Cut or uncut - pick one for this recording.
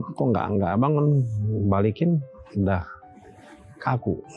uncut